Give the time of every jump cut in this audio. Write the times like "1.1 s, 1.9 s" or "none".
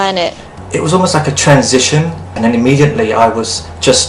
2.3 s